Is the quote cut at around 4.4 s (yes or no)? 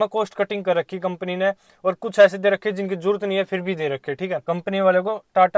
yes